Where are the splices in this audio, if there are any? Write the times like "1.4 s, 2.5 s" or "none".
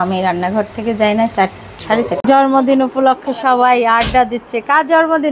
2.2 s